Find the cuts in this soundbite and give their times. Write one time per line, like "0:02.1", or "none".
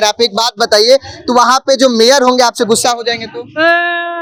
none